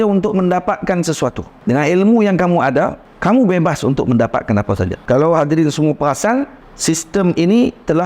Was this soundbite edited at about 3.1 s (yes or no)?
yes